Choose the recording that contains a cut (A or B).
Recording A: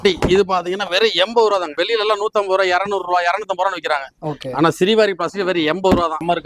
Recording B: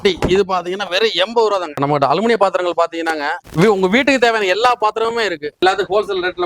B